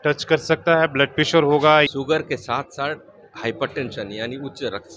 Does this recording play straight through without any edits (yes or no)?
no